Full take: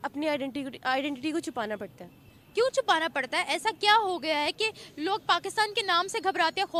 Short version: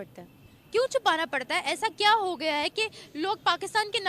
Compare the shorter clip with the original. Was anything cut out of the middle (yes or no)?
no